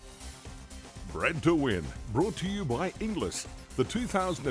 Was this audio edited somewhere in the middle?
yes; 1 cut; at 1.1 s

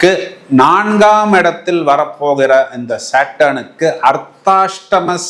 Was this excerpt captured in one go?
yes; 0 cuts

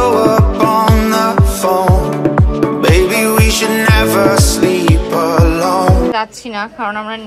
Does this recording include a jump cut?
yes; 1 cut; at 6.1 s

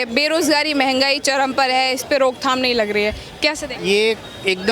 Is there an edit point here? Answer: no; 0 cuts

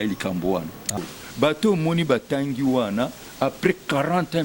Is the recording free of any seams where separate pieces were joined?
no; 1 cut; at 0.9 s

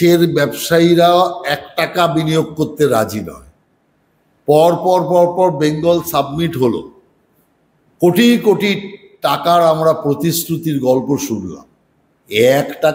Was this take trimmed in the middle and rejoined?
no; 0 cuts

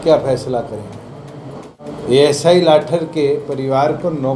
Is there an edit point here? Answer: yes; 1 cut; at 1.9 s

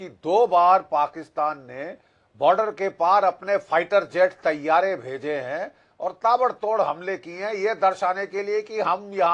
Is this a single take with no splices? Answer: yes; 0 cuts

